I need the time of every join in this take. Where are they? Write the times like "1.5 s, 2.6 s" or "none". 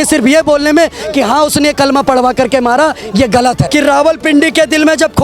3.6 s